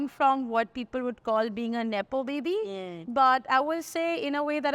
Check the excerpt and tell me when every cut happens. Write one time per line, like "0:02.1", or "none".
none